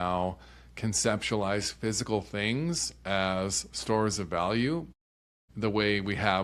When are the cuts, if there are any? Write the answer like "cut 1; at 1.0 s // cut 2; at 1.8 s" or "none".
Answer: none